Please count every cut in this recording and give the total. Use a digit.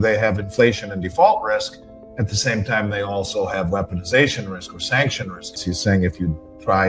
1